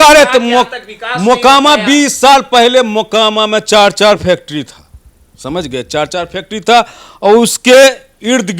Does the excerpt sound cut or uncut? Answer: uncut